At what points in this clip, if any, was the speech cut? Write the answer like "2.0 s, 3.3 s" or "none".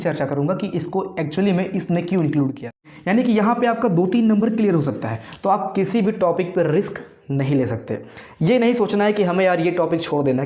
2.8 s